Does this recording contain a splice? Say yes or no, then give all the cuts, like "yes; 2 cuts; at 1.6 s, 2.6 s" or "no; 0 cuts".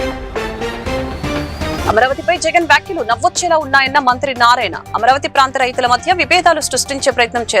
yes; 1 cut; at 1.7 s